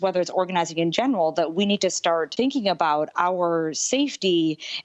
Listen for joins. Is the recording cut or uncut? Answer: cut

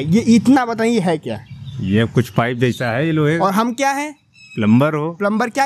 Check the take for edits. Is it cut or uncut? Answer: uncut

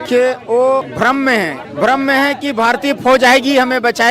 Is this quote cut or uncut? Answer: cut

